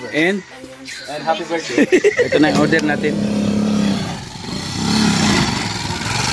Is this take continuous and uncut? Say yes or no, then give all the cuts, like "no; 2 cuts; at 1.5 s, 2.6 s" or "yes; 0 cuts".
no; 1 cut; at 2.3 s